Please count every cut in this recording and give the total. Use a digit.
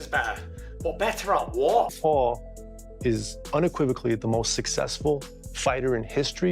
1